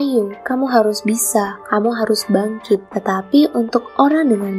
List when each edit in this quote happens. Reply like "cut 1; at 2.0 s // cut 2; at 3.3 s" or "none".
cut 1; at 1.6 s